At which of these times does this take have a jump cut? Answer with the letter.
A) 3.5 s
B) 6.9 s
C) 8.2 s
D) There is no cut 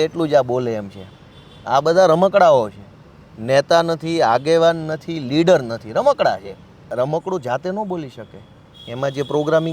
B